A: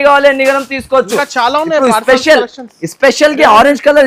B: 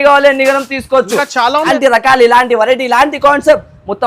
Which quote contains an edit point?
B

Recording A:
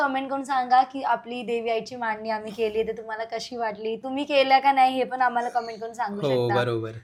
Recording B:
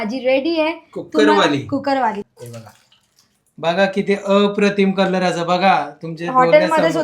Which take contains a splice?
B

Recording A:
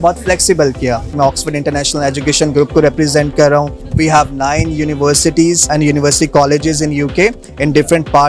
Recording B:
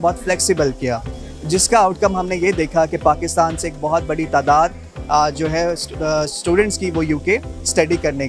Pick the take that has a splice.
A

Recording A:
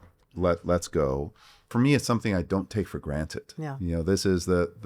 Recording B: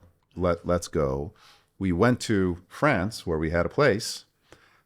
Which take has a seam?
A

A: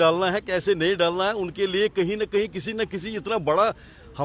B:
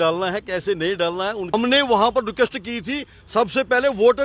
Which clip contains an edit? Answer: B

